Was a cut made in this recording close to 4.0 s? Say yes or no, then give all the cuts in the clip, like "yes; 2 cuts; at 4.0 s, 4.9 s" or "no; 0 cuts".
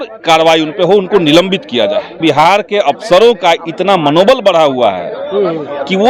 no; 1 cut; at 2.1 s